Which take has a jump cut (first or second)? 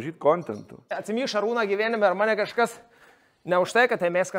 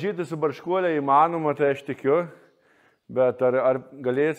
first